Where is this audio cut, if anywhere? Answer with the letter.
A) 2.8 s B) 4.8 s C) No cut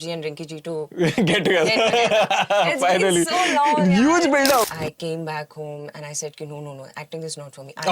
B